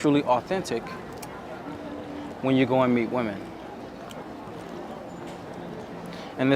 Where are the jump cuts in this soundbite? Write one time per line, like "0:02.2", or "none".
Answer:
none